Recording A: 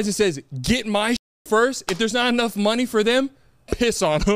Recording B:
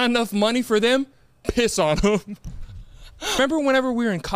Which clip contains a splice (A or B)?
B